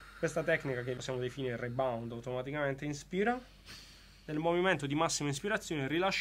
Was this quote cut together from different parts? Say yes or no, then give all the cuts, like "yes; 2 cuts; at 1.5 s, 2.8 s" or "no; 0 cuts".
yes; 1 cut; at 1.0 s